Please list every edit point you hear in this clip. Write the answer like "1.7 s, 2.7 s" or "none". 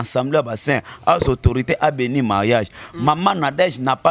none